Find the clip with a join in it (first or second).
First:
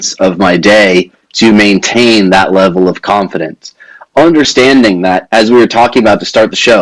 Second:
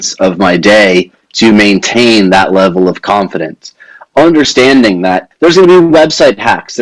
second